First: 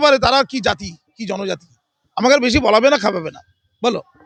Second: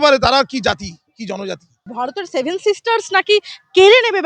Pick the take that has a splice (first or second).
second